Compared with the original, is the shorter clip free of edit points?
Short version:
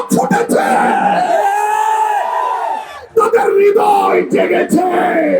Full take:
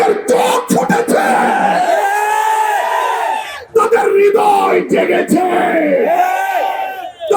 yes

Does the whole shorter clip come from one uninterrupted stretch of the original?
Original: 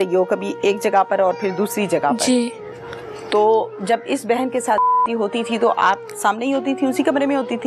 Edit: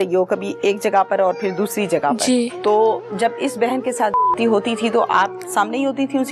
no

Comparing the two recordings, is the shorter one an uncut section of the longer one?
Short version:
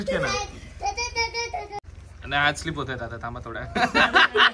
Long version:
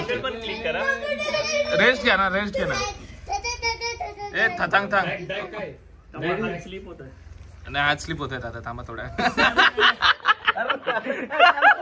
no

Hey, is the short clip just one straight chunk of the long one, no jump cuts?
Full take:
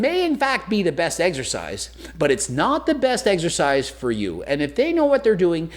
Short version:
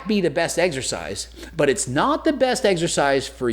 yes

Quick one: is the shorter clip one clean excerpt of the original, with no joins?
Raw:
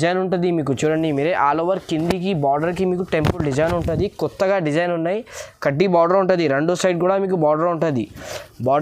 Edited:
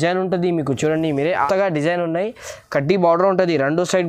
no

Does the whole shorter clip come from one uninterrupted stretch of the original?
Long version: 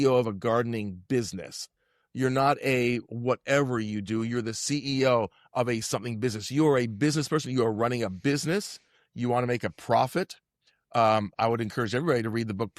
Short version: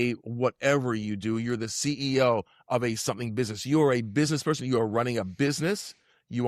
yes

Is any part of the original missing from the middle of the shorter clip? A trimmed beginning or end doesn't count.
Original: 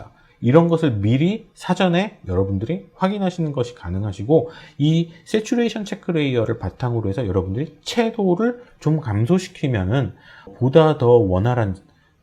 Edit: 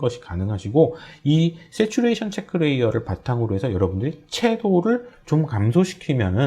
no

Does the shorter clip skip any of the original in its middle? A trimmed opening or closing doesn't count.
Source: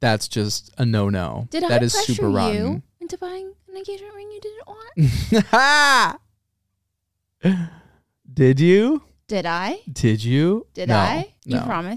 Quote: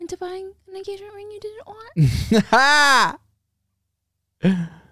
no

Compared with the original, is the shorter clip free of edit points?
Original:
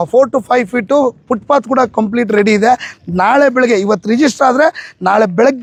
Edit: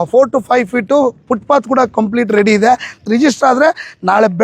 no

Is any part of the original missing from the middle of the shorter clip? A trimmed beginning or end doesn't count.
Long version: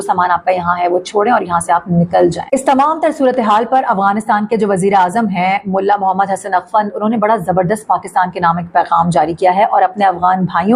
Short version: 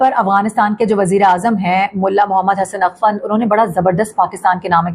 no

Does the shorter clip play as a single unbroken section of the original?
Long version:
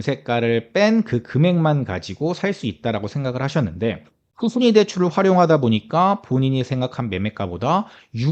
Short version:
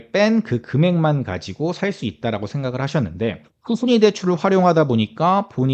no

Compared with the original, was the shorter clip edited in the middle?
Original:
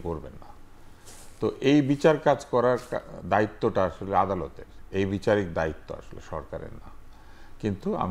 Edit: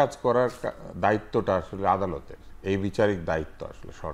no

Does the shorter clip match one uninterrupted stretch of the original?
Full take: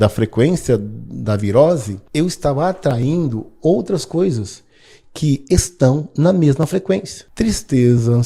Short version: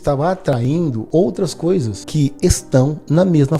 no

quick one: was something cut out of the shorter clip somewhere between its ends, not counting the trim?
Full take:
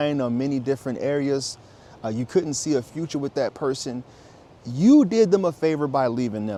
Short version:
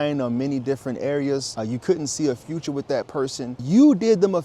yes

